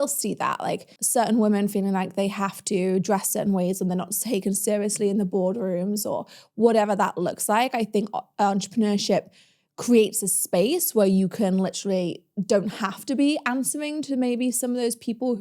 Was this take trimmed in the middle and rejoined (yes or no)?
yes